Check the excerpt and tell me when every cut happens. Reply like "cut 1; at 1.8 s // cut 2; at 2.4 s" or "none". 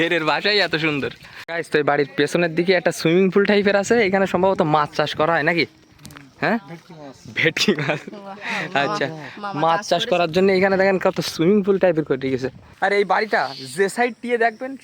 cut 1; at 1.5 s // cut 2; at 12.7 s